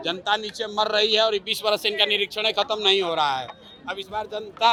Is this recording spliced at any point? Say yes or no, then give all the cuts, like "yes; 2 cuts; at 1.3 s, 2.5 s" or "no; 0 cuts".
no; 0 cuts